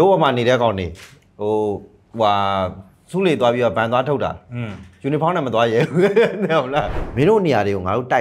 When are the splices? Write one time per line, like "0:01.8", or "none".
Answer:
0:07.0